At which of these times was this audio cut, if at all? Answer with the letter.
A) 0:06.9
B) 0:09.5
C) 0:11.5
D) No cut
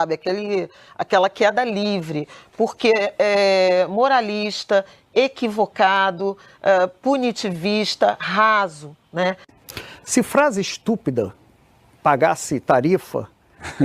B